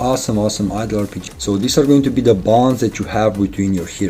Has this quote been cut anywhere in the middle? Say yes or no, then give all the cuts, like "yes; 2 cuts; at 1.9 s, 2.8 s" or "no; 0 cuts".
yes; 1 cut; at 1.2 s